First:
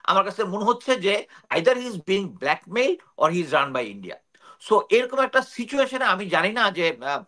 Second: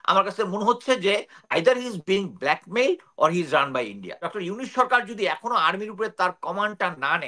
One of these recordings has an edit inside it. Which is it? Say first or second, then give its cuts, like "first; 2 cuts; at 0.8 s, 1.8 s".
second; 1 cut; at 4.2 s